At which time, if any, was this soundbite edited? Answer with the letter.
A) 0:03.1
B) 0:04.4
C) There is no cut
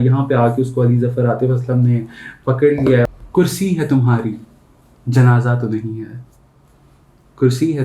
A